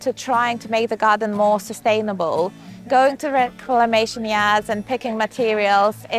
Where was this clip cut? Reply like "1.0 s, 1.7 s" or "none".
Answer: none

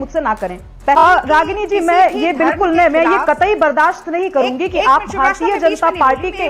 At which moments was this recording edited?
1.0 s, 4.2 s

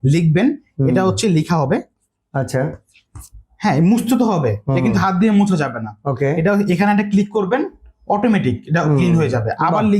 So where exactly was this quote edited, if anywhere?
none

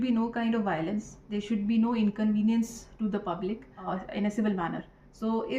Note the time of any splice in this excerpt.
3.8 s

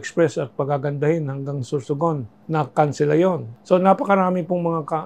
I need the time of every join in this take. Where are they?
2.3 s, 3.5 s

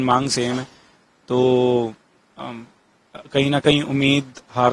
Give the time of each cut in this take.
none

